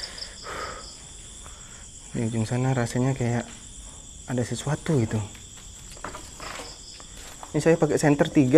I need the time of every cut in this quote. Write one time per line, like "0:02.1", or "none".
none